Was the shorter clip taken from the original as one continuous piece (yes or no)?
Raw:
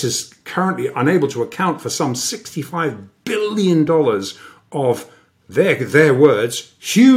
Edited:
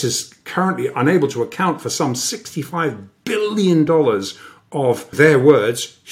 no